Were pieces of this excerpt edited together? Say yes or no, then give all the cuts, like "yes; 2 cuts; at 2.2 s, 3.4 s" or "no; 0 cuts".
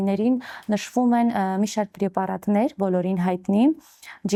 no; 0 cuts